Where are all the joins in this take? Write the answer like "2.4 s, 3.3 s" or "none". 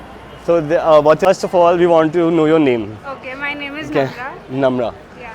1.3 s